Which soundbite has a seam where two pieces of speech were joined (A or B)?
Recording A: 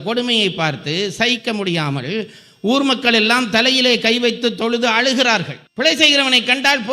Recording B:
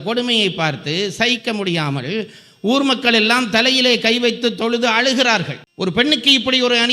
A